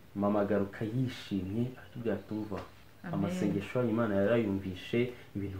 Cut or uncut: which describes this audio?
uncut